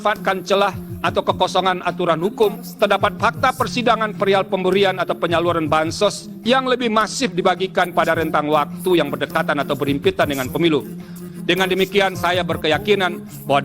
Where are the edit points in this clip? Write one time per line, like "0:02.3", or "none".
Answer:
0:02.6
0:06.3
0:11.2